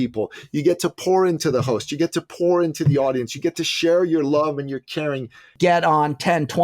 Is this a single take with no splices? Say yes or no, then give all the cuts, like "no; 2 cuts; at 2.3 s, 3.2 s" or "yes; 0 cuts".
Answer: no; 1 cut; at 5.5 s